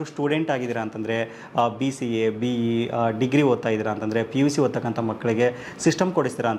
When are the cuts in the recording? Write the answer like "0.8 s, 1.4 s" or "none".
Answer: none